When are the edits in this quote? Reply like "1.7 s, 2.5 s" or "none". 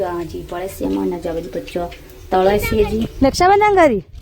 3.1 s